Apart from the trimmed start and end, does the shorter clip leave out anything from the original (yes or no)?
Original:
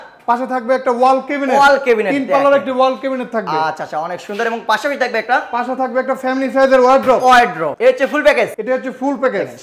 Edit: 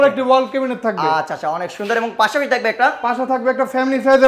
no